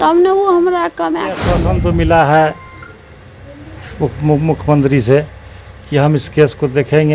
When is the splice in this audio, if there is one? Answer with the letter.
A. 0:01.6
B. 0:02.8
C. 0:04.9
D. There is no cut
A